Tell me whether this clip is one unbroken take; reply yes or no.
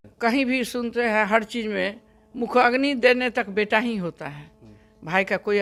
yes